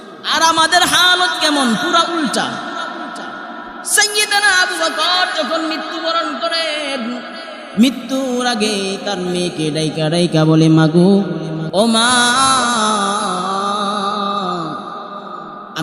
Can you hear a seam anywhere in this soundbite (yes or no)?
yes